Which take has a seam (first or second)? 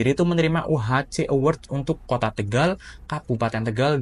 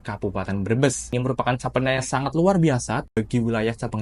second